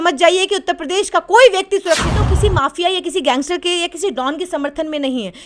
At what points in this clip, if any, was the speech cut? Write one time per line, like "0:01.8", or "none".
0:02.2